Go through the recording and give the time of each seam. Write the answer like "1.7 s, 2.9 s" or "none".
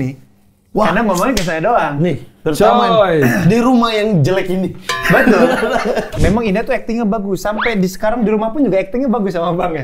6.1 s